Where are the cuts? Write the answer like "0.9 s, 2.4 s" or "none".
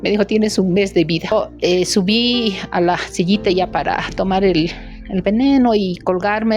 1.3 s